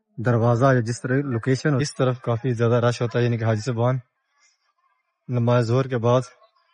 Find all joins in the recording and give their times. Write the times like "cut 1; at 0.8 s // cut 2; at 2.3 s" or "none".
cut 1; at 1.8 s